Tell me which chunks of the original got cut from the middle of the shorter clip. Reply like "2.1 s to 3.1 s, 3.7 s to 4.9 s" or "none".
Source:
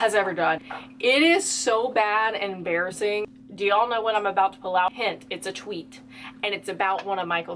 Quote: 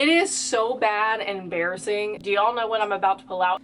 3.3 s to 3.5 s